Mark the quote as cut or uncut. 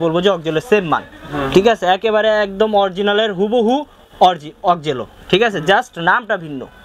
uncut